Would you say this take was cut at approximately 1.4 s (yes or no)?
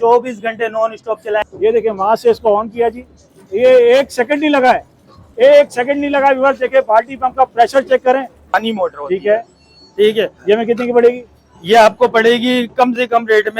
yes